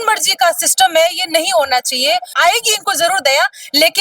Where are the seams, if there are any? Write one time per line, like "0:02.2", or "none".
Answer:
0:02.4